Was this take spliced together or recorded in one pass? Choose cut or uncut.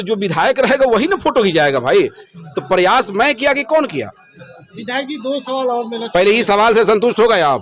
uncut